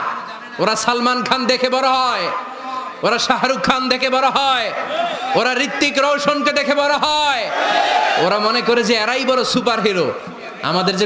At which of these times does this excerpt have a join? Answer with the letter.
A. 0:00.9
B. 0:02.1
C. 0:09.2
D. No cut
D